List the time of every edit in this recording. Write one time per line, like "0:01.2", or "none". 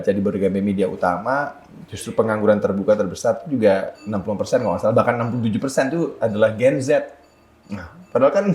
none

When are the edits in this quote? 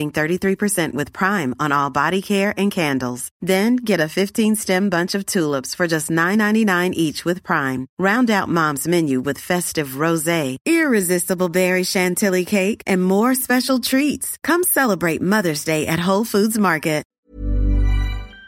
0:17.1

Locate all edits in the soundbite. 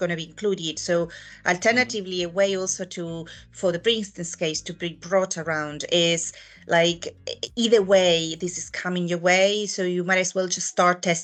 none

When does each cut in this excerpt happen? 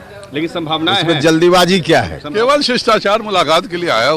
0:02.2

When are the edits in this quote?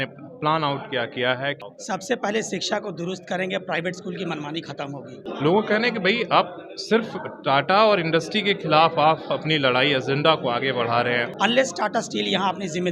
0:01.7
0:05.2
0:11.3

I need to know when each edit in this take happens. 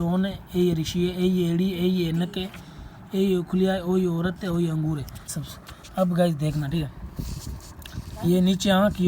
0:05.3

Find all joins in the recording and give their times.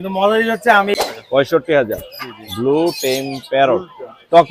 0:00.9

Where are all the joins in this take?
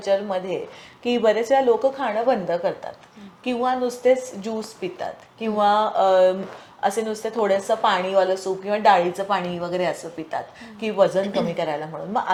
none

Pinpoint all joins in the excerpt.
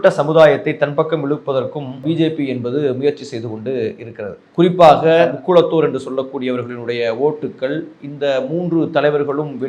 0:02.0
0:05.3

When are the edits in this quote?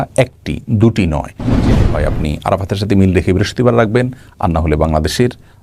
0:01.7

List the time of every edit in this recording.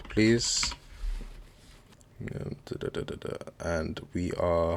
0:02.0

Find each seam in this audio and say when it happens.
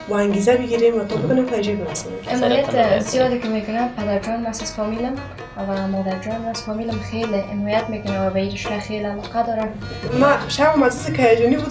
0:02.1
0:09.9

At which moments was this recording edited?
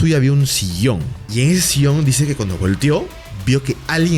0:01.2

